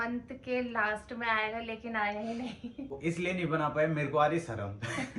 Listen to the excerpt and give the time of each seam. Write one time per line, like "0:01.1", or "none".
0:03.0